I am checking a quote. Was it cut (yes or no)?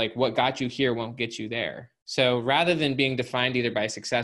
no